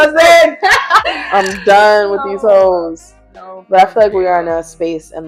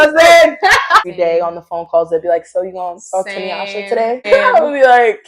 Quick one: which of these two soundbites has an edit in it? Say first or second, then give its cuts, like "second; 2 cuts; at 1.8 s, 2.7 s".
second; 2 cuts; at 1.1 s, 4.2 s